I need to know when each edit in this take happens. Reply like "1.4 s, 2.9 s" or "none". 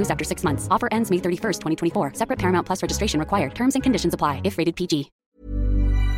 5.2 s